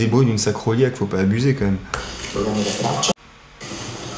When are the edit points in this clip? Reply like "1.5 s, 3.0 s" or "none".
3.1 s